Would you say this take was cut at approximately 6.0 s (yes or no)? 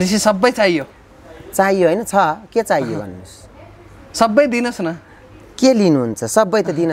no